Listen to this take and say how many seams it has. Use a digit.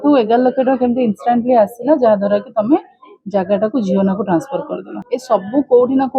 1